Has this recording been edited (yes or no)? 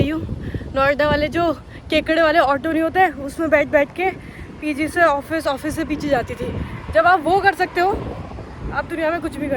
no